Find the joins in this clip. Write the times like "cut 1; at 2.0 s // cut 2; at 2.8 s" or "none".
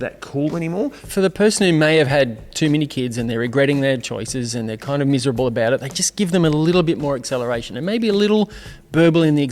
cut 1; at 1.0 s

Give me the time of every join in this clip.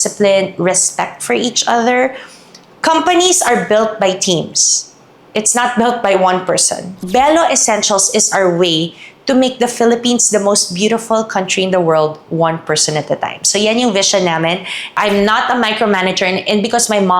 cut 1; at 7.0 s // cut 2; at 14.9 s

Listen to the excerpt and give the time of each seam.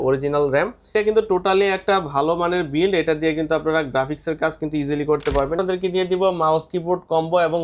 cut 1; at 0.9 s // cut 2; at 5.6 s

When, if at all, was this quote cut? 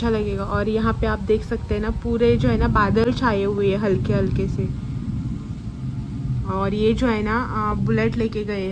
none

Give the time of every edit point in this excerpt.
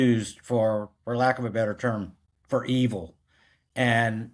none

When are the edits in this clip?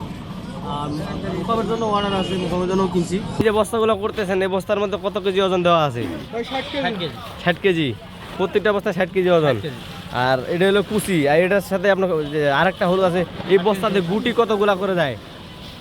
cut 1; at 3.4 s

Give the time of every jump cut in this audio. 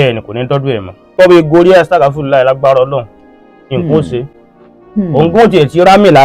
cut 1; at 1.1 s

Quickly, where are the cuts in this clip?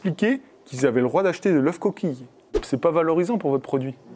cut 1; at 2.5 s

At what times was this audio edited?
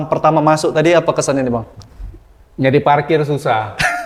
none

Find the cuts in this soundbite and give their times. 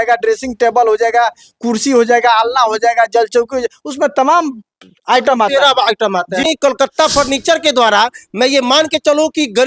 cut 1; at 6.4 s

